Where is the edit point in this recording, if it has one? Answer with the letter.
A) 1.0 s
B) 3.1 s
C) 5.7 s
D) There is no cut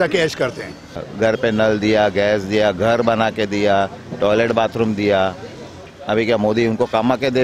A